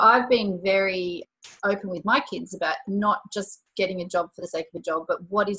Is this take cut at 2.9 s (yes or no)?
yes